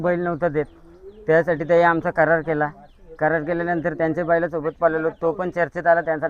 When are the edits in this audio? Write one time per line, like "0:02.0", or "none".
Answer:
none